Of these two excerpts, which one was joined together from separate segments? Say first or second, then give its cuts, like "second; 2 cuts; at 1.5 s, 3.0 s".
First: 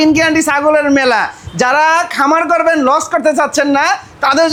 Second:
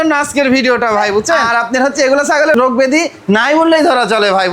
second; 2 cuts; at 1.4 s, 2.5 s